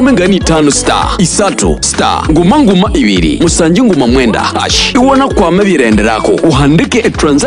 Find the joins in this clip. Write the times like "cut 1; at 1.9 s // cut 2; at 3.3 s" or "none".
none